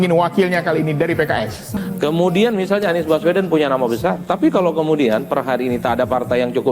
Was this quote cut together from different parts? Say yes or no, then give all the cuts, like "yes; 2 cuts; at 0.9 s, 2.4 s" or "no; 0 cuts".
yes; 1 cut; at 1.6 s